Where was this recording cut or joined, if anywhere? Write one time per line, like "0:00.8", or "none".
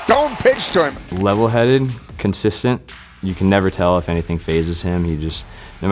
0:01.0